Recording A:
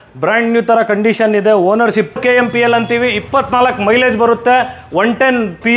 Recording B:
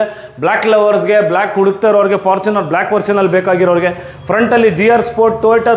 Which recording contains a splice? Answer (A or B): A